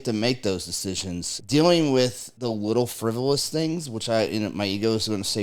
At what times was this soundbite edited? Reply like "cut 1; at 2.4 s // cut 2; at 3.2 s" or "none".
cut 1; at 1.3 s // cut 2; at 2.3 s